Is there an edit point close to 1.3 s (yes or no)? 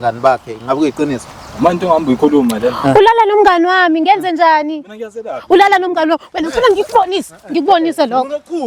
no